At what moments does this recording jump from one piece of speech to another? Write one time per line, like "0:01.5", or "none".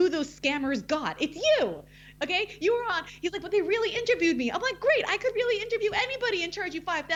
none